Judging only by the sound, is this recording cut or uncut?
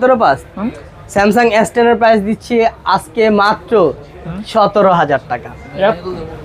uncut